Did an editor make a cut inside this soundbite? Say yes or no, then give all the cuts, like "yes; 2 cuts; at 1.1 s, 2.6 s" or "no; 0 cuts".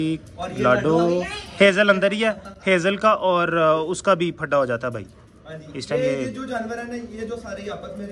no; 0 cuts